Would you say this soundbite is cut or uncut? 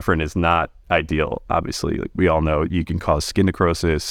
uncut